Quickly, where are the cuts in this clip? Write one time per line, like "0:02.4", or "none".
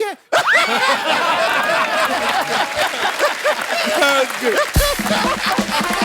none